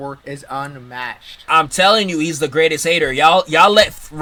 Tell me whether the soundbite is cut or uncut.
uncut